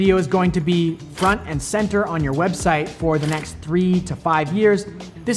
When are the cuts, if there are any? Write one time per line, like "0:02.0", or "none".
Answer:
none